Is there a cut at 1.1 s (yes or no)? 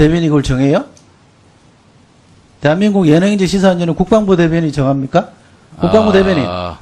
no